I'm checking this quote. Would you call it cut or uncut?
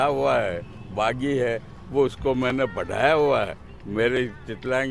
uncut